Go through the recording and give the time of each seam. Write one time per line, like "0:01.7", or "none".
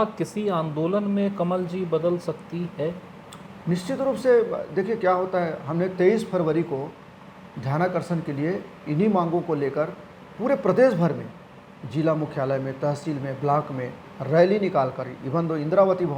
none